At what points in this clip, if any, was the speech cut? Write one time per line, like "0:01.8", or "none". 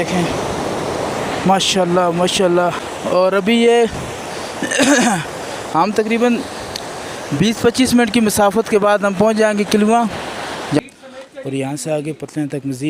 0:02.9
0:10.8